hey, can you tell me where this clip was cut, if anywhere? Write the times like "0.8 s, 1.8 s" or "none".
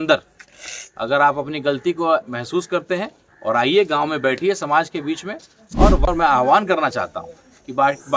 6.1 s